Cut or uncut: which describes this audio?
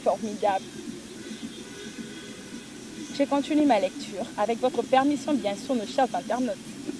uncut